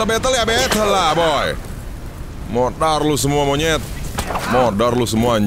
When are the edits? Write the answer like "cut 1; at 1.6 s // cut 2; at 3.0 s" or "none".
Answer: cut 1; at 4.2 s